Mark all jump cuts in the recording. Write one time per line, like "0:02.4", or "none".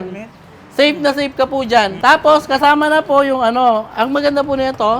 0:01.9